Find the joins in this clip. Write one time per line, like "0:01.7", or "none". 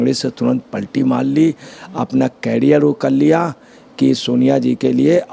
none